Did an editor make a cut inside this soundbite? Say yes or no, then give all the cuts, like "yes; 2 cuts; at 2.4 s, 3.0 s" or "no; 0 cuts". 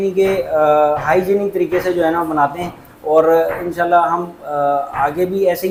no; 0 cuts